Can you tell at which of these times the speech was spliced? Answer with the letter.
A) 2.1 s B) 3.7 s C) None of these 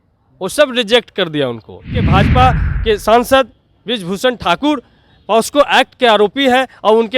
A